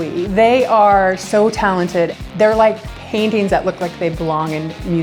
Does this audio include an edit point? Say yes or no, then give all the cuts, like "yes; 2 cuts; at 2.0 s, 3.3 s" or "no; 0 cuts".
no; 0 cuts